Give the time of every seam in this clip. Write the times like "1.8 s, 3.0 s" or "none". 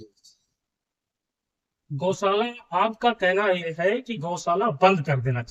none

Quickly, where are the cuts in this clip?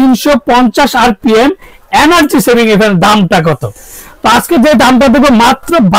none

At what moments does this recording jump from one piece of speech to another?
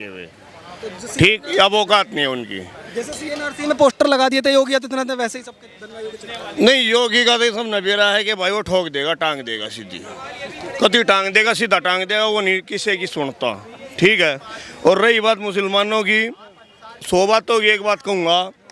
none

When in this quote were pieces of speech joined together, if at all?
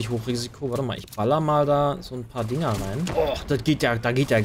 3.1 s

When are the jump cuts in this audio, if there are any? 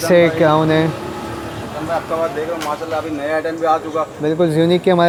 none

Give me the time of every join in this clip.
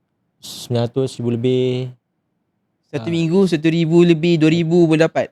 none

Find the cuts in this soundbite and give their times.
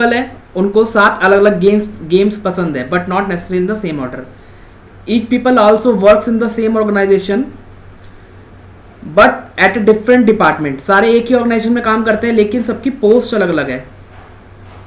7.8 s

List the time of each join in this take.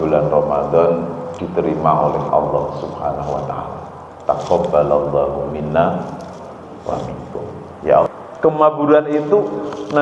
8.1 s

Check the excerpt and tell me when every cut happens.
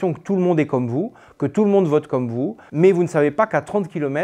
2.6 s

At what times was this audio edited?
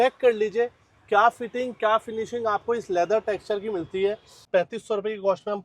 4.4 s

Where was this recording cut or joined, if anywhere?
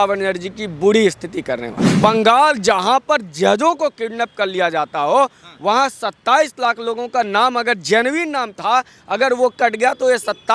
2.0 s

